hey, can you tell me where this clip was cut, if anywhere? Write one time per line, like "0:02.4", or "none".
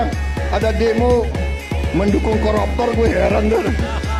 none